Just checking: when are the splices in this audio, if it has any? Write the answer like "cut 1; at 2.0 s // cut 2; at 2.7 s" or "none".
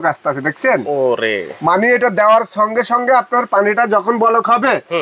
none